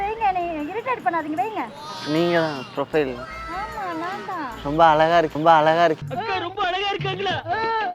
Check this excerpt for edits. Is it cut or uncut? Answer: cut